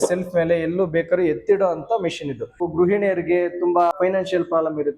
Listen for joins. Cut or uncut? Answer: cut